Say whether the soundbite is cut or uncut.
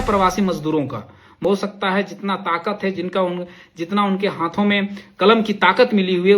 cut